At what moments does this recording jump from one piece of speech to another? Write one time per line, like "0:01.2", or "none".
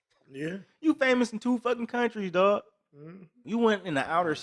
0:03.3